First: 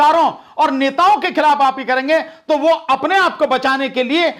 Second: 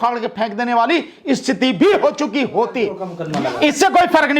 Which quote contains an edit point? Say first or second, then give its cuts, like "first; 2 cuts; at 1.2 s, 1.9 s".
second; 1 cut; at 3.1 s